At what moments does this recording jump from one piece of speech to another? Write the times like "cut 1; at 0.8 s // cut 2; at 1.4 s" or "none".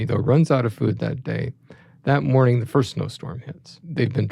none